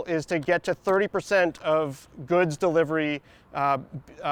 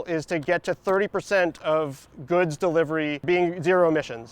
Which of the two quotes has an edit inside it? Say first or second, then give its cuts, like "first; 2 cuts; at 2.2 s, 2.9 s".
second; 1 cut; at 3.2 s